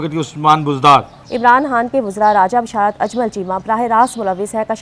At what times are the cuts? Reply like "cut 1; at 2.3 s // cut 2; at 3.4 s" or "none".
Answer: cut 1; at 1.2 s